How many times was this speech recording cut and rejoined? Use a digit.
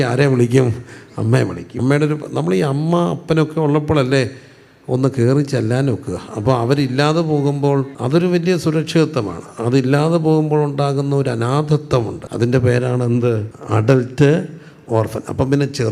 4